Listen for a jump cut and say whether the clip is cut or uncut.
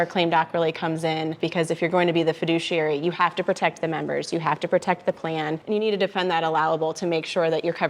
cut